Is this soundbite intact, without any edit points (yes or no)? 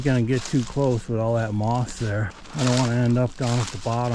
no